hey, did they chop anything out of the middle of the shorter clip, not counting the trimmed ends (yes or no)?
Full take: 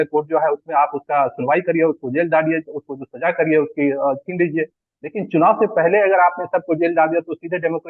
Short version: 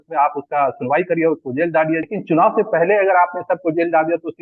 yes